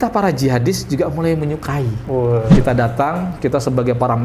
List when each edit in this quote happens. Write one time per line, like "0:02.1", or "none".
0:02.5